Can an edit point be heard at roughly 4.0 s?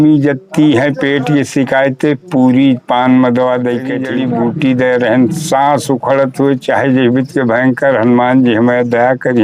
yes; 1 cut; at 4.0 s

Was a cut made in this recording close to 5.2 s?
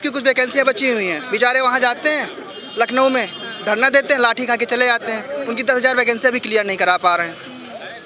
no; 0 cuts

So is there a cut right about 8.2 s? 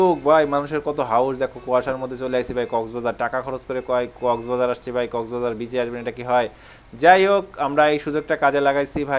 no; 0 cuts

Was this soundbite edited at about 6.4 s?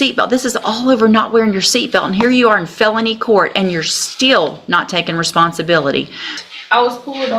yes; 1 cut; at 6.4 s

